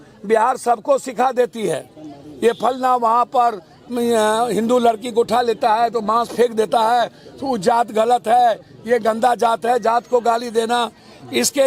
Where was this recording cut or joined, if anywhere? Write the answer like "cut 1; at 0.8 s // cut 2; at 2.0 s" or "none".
none